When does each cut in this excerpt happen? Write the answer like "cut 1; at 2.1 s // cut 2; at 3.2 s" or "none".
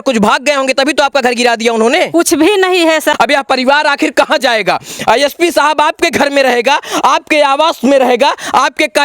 cut 1; at 3.1 s